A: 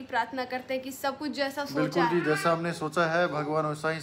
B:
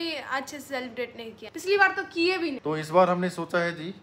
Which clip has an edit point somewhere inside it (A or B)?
B